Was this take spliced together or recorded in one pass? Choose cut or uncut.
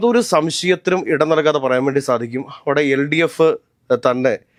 uncut